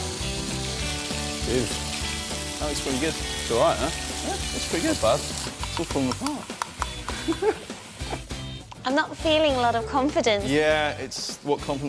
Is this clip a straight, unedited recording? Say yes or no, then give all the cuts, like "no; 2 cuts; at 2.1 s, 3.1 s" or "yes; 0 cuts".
no; 1 cut; at 5.8 s